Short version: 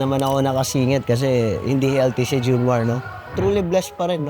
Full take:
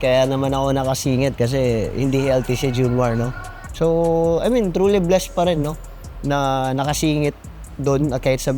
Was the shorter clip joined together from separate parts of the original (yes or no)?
yes